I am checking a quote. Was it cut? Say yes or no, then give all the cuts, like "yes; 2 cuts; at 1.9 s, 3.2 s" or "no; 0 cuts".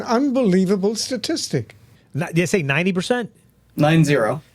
no; 0 cuts